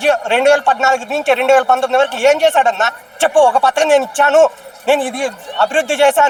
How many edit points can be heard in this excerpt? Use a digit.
0